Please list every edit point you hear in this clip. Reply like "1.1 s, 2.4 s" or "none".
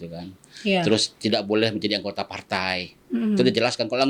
none